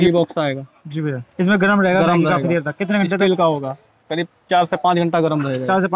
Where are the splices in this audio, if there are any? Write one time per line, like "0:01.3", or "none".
0:01.2